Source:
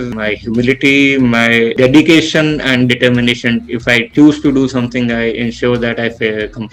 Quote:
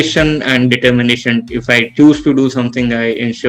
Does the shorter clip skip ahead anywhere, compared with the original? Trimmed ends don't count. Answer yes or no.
no